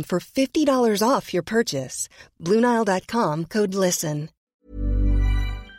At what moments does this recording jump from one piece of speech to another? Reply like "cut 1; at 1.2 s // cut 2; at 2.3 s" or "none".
cut 1; at 4.5 s